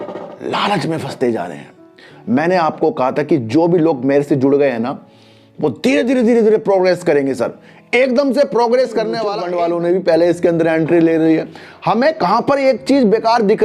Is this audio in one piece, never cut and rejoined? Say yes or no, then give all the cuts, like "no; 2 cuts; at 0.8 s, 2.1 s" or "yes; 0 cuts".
no; 1 cut; at 9.4 s